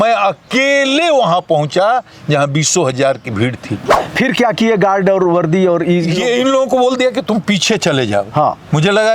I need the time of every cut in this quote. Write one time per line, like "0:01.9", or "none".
0:04.0